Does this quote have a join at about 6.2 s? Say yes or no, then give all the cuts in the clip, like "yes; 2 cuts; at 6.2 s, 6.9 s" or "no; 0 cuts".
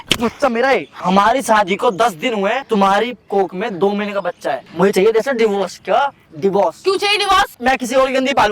no; 4 cuts; at 0.9 s, 2.7 s, 4.6 s, 7.6 s